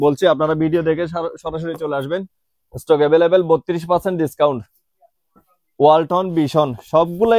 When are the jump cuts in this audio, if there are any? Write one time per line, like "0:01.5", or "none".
none